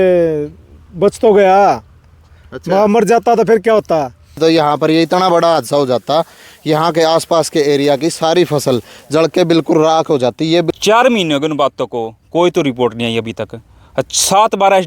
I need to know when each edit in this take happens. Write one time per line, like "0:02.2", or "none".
0:04.4
0:10.7